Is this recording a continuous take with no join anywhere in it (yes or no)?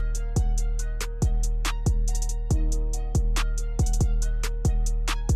yes